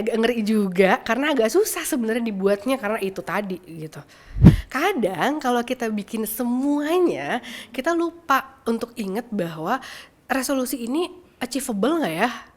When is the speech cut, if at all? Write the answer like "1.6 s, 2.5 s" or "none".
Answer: 4.7 s